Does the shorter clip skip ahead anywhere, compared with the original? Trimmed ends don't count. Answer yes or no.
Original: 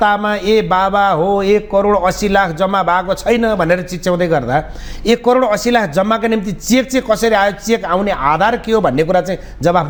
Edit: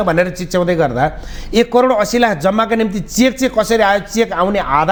no